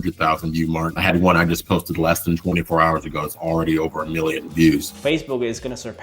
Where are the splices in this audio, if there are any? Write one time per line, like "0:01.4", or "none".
0:04.9